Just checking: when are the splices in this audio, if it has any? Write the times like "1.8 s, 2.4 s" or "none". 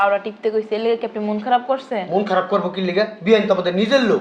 none